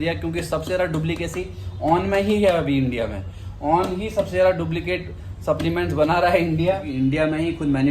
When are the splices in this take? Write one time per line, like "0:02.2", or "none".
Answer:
0:06.9